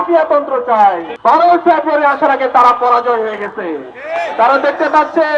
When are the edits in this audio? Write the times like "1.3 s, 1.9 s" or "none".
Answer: 1.1 s